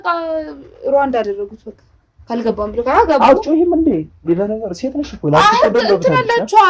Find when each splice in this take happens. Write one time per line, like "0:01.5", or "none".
none